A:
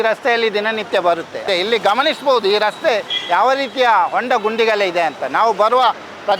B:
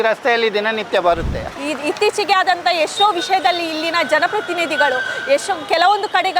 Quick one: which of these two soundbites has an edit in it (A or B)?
B